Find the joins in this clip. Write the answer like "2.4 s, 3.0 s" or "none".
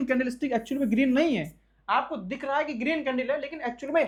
none